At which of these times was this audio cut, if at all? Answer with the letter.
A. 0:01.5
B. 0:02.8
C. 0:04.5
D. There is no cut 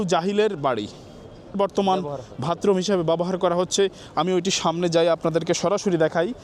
A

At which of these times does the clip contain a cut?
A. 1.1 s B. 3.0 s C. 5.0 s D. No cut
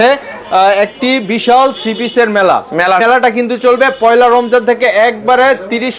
B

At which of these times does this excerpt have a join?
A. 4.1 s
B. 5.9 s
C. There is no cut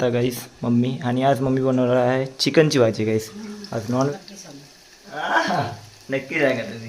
A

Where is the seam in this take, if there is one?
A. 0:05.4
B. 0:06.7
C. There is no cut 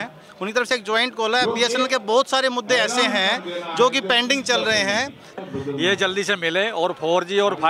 A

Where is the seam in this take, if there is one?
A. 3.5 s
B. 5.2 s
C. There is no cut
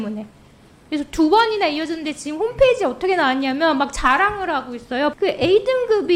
B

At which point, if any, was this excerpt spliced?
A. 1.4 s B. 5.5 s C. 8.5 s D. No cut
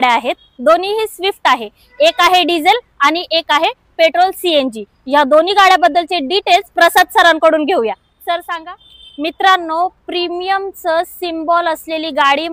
C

